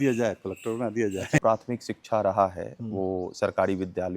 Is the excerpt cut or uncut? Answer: cut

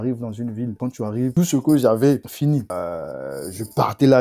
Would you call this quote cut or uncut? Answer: cut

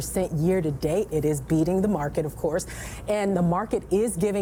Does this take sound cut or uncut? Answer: uncut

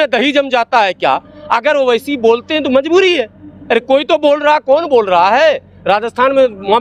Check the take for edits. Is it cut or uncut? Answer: uncut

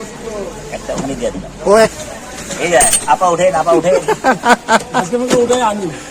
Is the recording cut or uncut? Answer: cut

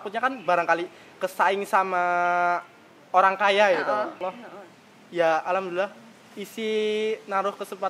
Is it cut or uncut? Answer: cut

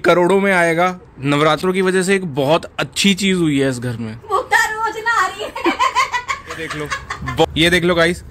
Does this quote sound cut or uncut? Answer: cut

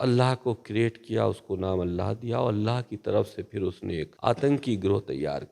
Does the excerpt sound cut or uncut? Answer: cut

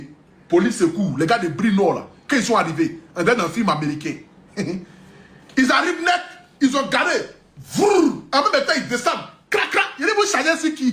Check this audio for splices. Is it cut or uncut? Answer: uncut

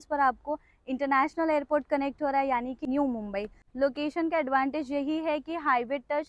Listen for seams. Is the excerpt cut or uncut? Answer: cut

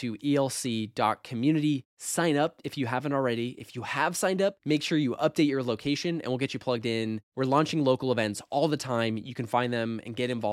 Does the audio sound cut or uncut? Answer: uncut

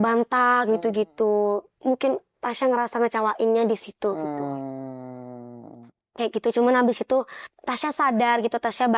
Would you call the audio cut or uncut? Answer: uncut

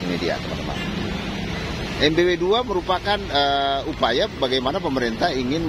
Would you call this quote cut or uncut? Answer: uncut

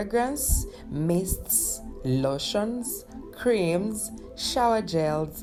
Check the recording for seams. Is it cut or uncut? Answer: uncut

